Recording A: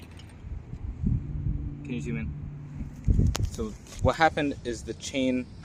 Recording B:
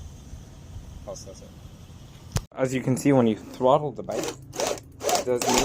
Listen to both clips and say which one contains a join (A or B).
B